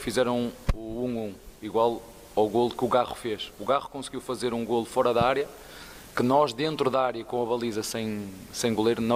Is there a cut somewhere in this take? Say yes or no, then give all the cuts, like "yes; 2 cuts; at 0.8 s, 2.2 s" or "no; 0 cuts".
no; 0 cuts